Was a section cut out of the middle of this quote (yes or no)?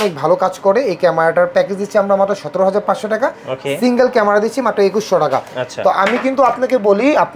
no